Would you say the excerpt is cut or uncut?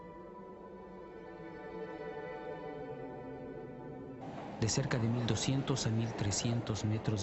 uncut